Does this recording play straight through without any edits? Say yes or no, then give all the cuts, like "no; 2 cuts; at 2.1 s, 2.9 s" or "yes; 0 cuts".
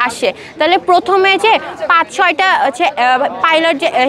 yes; 0 cuts